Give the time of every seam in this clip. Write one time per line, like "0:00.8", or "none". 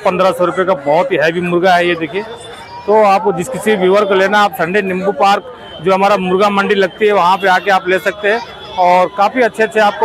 none